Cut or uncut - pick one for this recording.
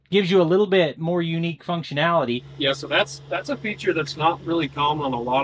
cut